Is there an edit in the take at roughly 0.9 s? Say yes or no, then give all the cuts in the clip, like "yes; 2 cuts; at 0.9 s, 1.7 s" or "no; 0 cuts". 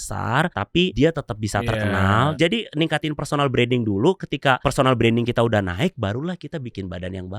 yes; 3 cuts; at 0.9 s, 2.3 s, 4.6 s